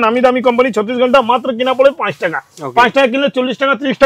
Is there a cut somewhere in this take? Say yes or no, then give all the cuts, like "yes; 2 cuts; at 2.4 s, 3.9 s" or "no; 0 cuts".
no; 0 cuts